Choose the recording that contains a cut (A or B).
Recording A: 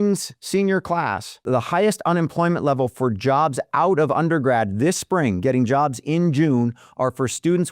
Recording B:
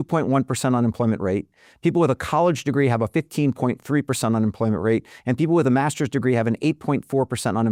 A